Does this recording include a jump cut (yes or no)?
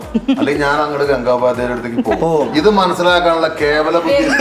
no